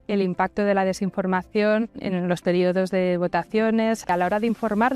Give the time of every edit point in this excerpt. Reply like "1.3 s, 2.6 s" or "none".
2.0 s, 4.0 s